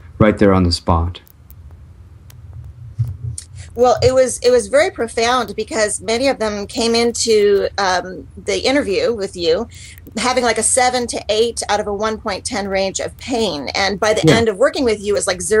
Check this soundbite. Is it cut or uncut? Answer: uncut